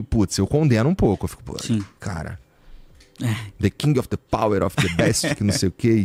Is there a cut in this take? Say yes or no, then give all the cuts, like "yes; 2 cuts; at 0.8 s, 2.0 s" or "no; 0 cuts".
no; 0 cuts